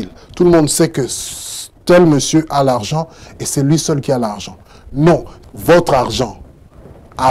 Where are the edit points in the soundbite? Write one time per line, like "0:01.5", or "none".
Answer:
0:05.4